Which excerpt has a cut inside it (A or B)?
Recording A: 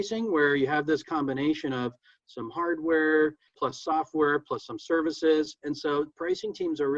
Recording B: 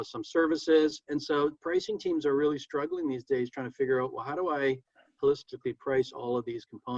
A